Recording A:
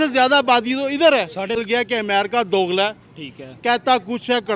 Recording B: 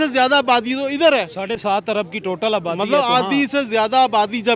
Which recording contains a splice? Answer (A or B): A